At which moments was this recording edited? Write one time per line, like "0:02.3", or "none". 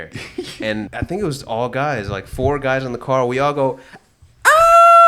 0:00.9

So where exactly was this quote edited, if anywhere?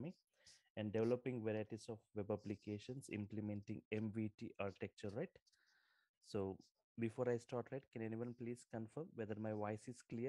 none

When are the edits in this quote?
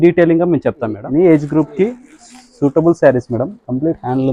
0:01.0

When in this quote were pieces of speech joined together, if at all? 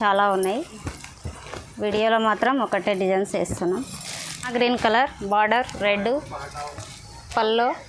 0:04.5

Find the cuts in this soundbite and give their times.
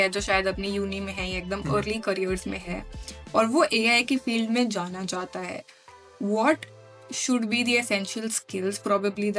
none

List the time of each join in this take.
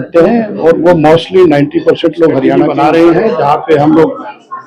0:02.6

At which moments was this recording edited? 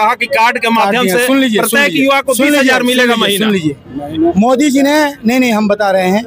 none

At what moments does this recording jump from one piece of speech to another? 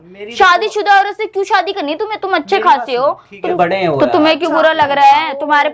0:03.5

